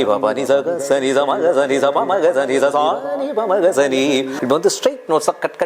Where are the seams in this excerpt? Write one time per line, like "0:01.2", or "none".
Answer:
0:04.4